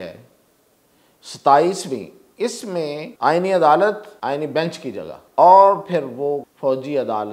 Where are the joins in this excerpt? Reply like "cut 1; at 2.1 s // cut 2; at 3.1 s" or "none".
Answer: cut 1; at 3.1 s // cut 2; at 4.1 s // cut 3; at 5.2 s // cut 4; at 6.5 s